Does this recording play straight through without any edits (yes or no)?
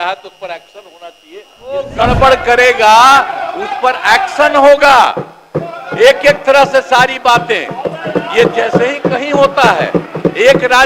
no